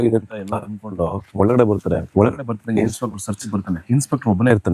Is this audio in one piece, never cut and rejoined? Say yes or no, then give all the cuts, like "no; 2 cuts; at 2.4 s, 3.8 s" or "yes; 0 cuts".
no; 3 cuts; at 1.2 s, 2.1 s, 3.8 s